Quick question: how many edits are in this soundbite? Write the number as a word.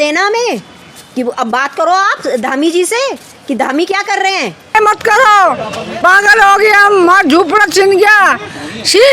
one